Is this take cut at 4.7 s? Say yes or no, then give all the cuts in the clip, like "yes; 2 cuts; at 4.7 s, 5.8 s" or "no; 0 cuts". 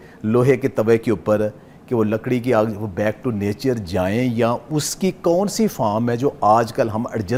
no; 0 cuts